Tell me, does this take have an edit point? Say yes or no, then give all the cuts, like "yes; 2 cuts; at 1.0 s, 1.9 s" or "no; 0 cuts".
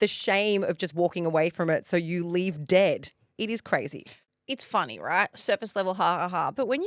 no; 0 cuts